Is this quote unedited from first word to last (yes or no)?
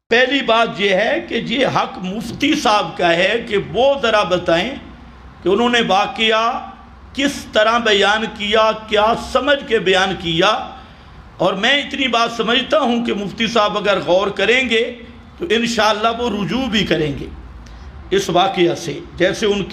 yes